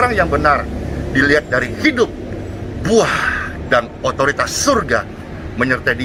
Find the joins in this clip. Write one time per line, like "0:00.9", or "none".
none